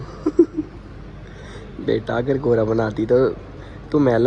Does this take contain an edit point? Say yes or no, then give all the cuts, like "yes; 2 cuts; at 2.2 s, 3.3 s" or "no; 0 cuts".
no; 0 cuts